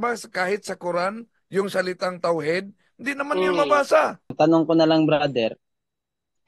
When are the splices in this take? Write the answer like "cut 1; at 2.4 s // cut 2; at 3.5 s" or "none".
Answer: cut 1; at 4.2 s

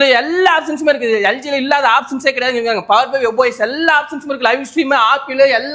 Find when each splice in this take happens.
none

